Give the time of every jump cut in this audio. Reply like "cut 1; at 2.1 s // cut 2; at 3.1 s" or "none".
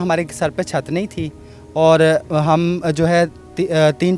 none